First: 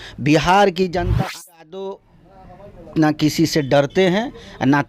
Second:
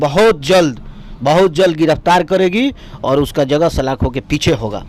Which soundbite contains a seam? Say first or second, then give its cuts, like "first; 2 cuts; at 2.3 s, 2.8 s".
first; 1 cut; at 1.0 s